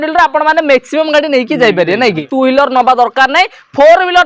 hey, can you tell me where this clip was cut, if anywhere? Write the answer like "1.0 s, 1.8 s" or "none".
2.3 s